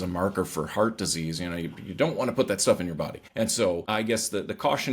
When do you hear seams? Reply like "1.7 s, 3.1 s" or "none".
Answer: 3.2 s, 3.8 s